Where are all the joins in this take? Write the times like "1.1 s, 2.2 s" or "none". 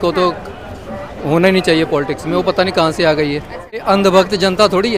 3.8 s